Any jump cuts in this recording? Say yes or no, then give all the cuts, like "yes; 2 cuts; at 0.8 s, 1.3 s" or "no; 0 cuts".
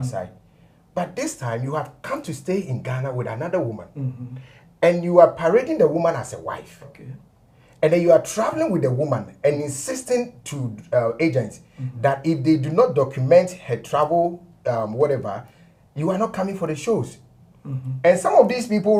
no; 0 cuts